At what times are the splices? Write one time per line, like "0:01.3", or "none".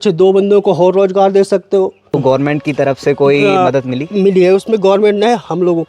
0:02.1